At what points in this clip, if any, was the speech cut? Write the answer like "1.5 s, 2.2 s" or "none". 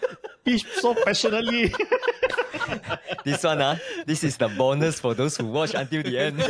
none